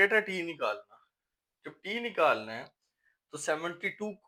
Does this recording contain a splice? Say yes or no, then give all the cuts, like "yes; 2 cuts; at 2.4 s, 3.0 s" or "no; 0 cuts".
no; 0 cuts